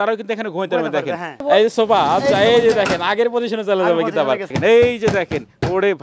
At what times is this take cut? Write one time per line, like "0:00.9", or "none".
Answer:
0:01.4
0:04.5